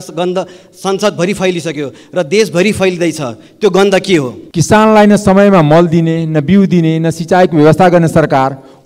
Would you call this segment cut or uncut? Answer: cut